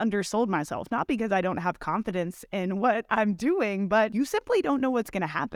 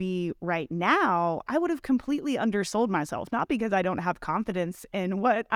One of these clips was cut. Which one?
first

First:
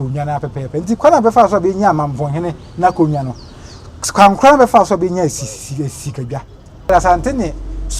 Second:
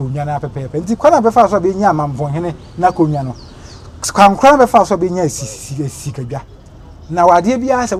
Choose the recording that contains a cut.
first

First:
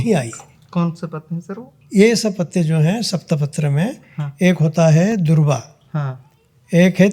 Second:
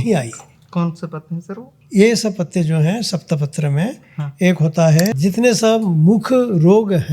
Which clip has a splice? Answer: second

